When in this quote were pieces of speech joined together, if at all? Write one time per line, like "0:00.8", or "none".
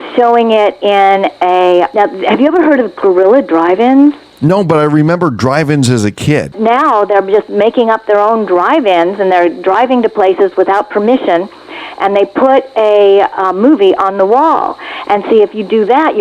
0:01.9
0:04.3
0:06.5